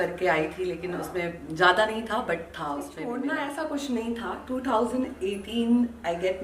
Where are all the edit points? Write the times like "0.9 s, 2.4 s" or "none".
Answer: 3.1 s